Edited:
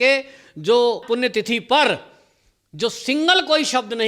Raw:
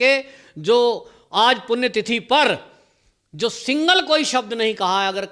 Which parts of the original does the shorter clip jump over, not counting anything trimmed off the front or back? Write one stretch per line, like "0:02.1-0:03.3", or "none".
0:01.0-0:01.6